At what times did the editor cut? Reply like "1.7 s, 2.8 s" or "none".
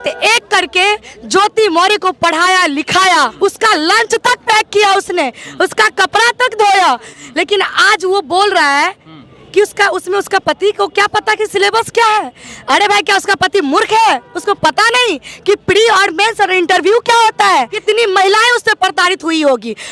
3.3 s, 7.1 s, 17.8 s